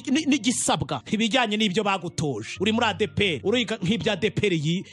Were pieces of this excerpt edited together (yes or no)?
yes